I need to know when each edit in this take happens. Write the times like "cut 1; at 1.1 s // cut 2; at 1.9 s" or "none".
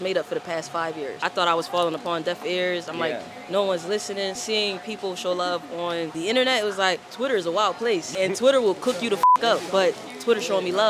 cut 1; at 1.3 s // cut 2; at 4.4 s // cut 3; at 6.1 s // cut 4; at 7.1 s // cut 5; at 8.1 s